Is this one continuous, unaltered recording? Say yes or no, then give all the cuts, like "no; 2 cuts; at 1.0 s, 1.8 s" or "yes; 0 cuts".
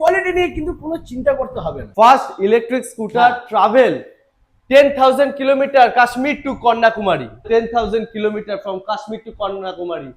no; 2 cuts; at 1.8 s, 7.4 s